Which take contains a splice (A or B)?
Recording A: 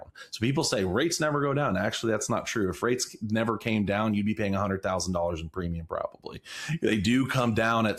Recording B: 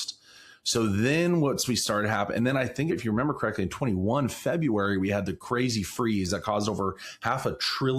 B